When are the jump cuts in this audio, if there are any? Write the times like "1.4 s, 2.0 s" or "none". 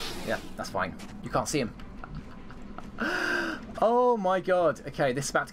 1.1 s